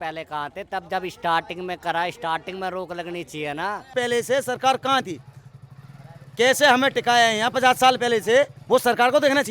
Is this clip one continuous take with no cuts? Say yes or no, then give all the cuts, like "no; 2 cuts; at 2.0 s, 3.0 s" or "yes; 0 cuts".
no; 2 cuts; at 3.9 s, 8.6 s